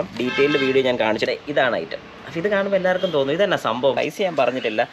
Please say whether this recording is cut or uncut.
cut